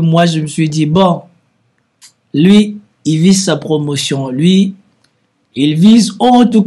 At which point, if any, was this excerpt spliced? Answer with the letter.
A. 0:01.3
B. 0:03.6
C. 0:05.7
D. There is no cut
D